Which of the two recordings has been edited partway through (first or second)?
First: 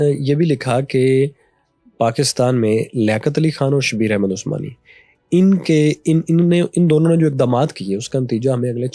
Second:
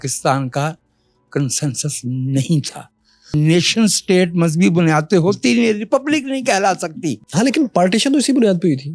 second